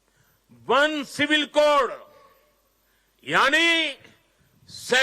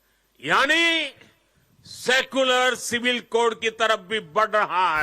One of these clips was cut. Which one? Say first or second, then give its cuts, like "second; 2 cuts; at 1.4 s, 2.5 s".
first; 1 cut; at 1.1 s